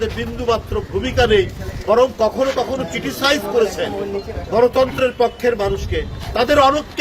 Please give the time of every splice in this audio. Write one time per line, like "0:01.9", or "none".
none

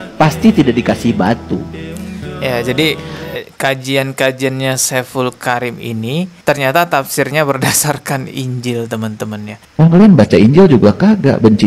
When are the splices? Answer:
0:06.4
0:09.5

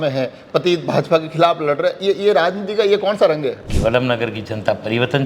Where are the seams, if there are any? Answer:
0:03.7

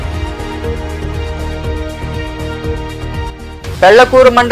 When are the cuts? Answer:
none

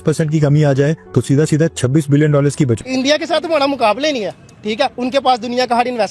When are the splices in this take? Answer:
0:02.8

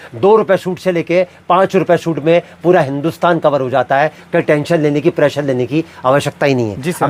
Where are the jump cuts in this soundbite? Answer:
none

